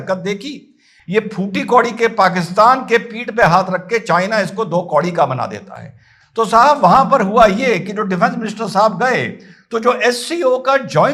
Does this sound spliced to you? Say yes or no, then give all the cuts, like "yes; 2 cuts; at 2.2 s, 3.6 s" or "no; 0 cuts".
no; 0 cuts